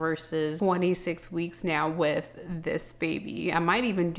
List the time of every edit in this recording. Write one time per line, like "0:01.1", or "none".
none